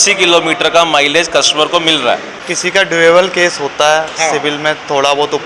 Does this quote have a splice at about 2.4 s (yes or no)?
yes